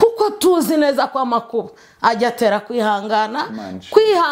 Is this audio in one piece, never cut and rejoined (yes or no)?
yes